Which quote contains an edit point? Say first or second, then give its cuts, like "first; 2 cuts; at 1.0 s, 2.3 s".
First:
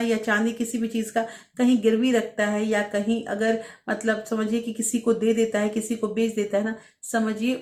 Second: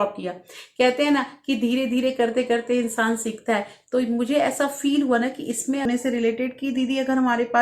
second; 1 cut; at 5.9 s